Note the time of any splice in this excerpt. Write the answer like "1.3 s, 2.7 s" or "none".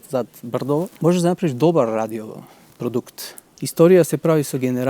0.9 s, 3.5 s